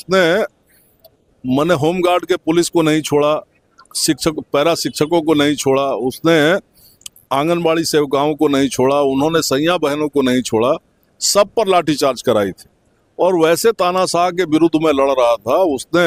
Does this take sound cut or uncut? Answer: uncut